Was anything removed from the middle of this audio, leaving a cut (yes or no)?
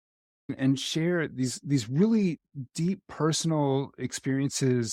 no